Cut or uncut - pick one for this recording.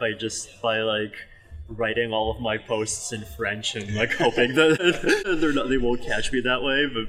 cut